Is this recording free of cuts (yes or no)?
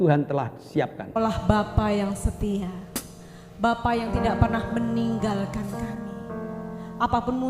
no